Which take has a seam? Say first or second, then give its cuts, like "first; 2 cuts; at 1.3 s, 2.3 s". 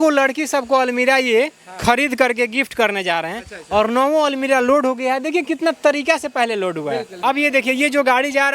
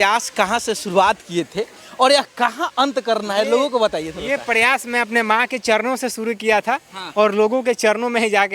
first; 1 cut; at 7.1 s